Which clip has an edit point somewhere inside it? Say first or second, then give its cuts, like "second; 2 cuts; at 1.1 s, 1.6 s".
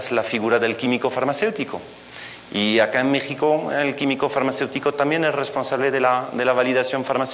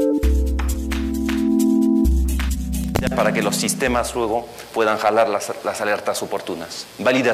first; 1 cut; at 2.8 s